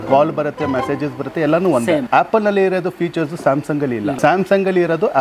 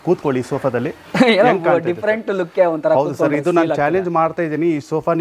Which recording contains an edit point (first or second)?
first